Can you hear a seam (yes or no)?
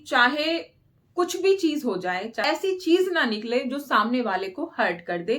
yes